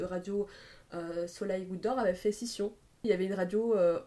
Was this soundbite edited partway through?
yes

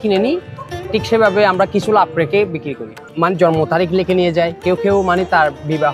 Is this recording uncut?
no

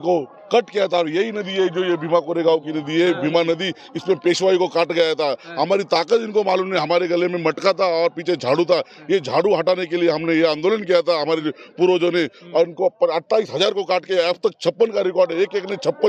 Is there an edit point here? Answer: no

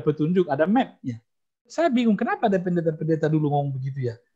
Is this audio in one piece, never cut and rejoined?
no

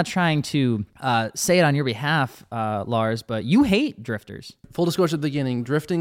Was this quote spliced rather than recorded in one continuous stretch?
yes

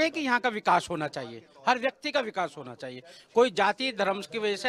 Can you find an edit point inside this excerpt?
no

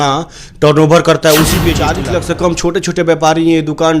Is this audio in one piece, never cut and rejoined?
no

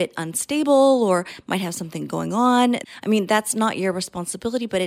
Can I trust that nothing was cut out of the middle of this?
no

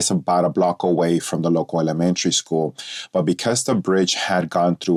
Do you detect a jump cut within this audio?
no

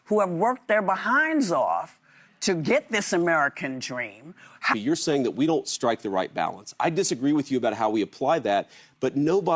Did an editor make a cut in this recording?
yes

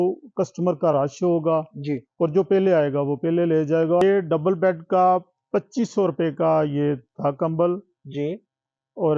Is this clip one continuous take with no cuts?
no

